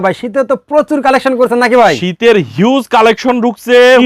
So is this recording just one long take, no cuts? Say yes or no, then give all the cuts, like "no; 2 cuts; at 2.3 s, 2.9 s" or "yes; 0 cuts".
yes; 0 cuts